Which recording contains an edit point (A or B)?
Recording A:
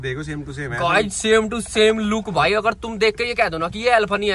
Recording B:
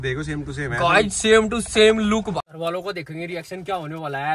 B